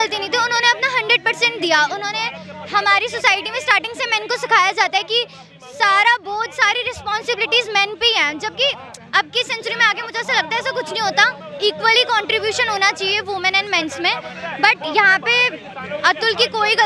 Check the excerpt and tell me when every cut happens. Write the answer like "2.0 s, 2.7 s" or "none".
none